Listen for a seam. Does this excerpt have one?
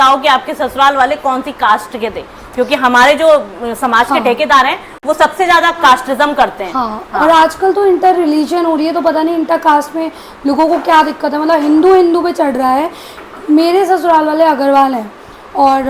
no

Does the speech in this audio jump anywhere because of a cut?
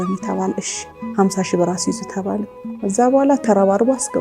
yes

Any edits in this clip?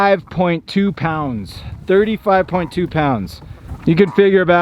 no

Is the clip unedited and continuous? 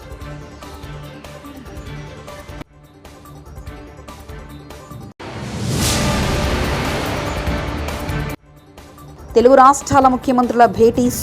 no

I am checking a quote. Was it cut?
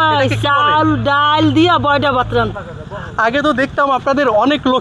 yes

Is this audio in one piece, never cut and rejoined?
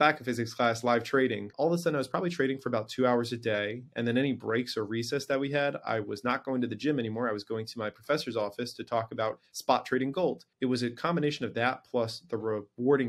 no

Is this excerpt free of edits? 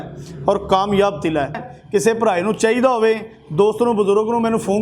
no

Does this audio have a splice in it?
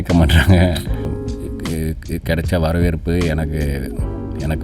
yes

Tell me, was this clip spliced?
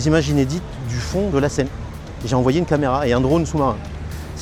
no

